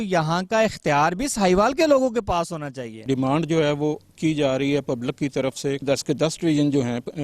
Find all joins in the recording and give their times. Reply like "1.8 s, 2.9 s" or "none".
3.1 s, 5.8 s